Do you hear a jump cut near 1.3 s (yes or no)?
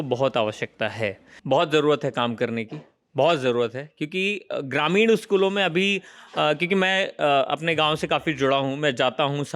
yes